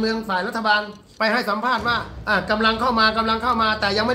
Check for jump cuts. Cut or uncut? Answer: cut